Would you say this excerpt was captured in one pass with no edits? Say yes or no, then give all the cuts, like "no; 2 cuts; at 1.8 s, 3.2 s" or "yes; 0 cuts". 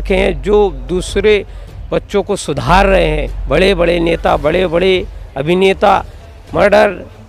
no; 1 cut; at 3.3 s